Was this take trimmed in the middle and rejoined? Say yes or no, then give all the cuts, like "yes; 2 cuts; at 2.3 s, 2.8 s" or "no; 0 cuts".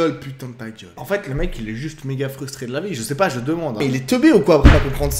yes; 2 cuts; at 1.0 s, 3.8 s